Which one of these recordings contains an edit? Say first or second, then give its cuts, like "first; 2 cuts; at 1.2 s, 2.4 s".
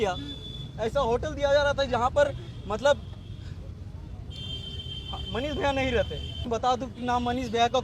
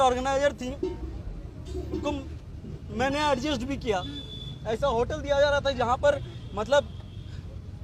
first; 1 cut; at 6.5 s